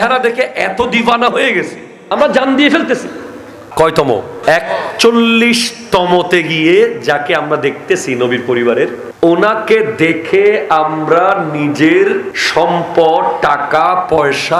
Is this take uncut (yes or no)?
no